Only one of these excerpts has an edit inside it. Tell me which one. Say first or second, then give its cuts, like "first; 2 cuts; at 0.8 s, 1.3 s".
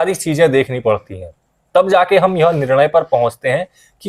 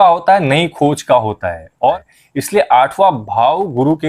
second; 1 cut; at 2.1 s